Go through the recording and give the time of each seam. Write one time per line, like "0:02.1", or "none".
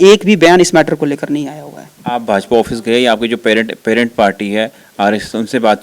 none

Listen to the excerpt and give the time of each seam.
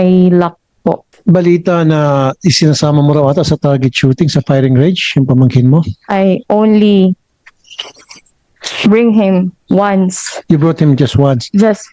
0:01.1
0:06.0

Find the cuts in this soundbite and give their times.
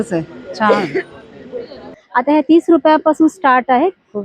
0:02.0

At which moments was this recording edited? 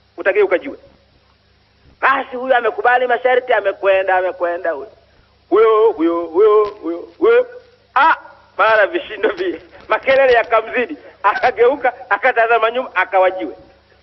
none

